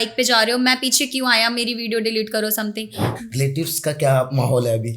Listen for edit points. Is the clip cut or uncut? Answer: cut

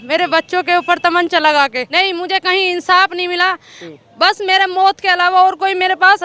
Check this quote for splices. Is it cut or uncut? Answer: cut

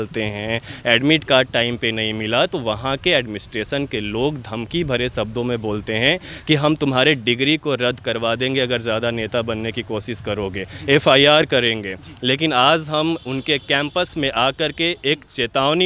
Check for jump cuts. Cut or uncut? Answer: uncut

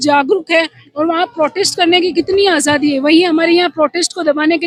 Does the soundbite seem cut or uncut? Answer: uncut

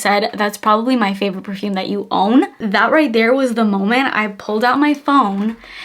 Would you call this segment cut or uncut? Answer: cut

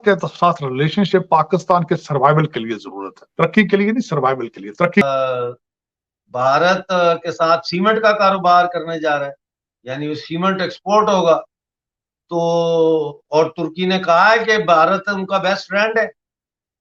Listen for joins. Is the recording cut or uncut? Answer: cut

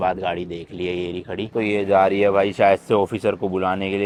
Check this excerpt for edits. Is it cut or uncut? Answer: uncut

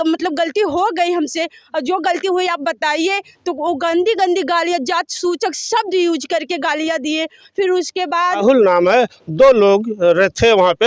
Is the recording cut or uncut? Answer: cut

